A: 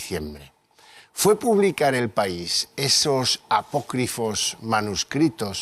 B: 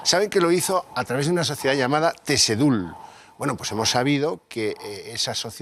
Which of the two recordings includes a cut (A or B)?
B